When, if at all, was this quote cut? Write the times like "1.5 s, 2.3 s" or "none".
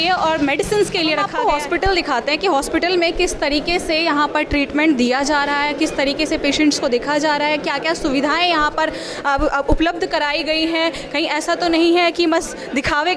1.3 s